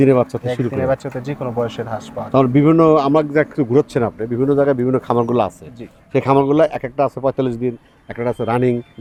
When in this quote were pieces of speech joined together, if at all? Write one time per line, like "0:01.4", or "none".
none